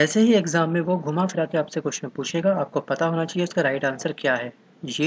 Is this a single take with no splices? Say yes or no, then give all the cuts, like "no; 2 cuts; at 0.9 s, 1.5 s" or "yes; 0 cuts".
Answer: yes; 0 cuts